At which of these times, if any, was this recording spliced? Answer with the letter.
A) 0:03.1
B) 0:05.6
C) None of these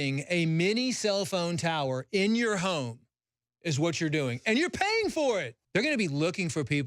B